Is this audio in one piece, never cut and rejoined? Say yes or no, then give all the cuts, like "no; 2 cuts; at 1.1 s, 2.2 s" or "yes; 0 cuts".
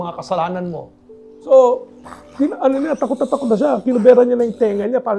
no; 1 cut; at 1.3 s